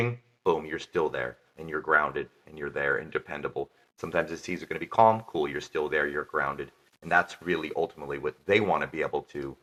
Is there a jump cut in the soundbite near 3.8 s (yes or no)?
no